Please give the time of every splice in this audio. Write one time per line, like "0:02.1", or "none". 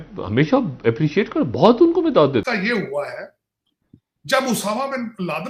0:02.5